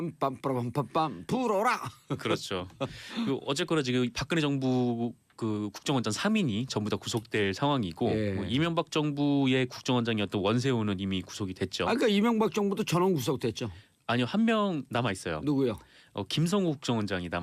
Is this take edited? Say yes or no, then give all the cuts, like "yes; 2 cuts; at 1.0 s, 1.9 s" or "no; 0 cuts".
yes; 1 cut; at 13.2 s